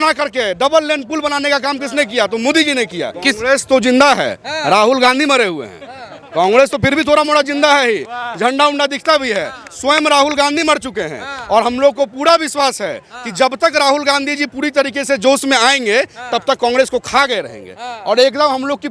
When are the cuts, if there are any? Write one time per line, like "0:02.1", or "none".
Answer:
0:03.1